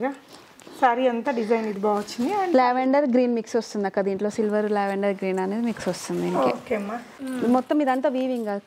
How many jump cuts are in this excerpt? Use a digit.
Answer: 1